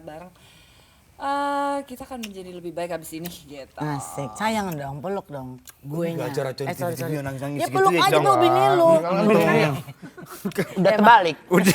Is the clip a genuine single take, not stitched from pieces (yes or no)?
yes